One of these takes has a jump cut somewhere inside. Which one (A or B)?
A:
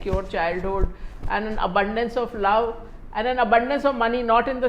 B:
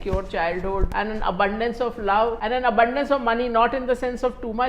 B